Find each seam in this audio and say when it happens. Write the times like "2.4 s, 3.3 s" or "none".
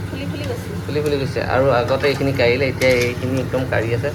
none